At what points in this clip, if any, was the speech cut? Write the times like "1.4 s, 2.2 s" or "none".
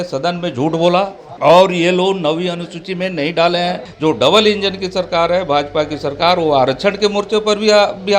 1.2 s, 3.9 s